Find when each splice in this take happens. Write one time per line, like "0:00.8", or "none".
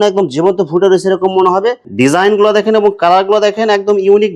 0:01.8